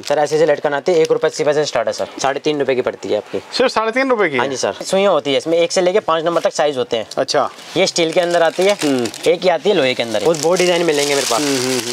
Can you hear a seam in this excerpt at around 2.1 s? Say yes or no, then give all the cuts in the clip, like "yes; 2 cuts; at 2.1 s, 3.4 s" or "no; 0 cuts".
yes; 3 cuts; at 2.1 s, 4.8 s, 10.2 s